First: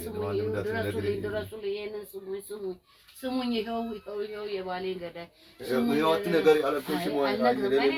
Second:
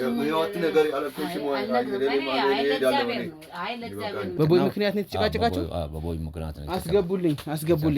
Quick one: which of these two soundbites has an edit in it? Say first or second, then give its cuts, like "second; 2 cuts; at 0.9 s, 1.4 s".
second; 1 cut; at 4.4 s